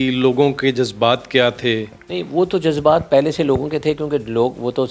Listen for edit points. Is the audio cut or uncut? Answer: uncut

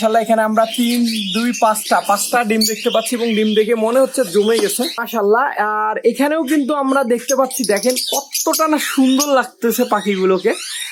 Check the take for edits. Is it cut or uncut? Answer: uncut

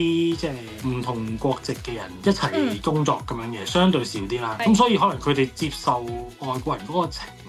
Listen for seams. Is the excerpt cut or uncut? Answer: uncut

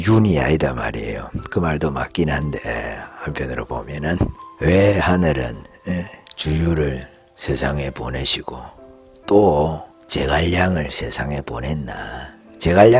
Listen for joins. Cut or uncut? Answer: uncut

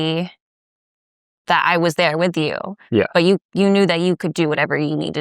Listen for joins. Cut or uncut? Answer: uncut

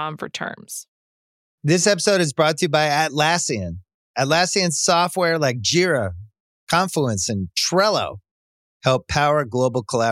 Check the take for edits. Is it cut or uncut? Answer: cut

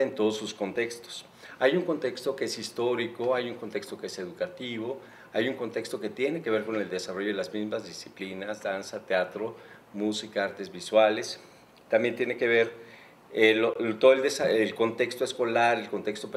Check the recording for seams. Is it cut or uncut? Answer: cut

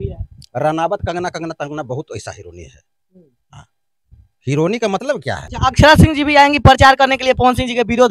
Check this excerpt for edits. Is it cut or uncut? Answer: cut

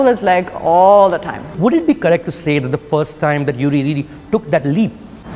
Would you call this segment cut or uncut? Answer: cut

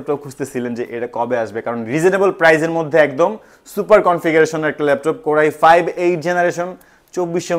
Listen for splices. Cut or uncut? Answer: uncut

